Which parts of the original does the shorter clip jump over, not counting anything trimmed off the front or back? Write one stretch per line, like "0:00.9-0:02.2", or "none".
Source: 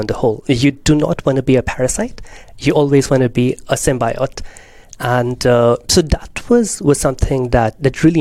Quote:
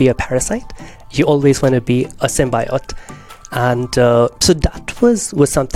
none